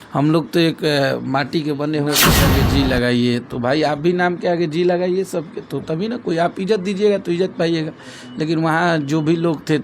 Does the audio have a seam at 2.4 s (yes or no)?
yes